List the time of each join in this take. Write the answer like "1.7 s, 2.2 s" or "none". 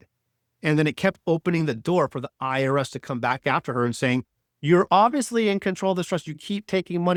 none